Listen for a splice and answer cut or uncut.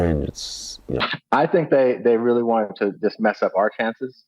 cut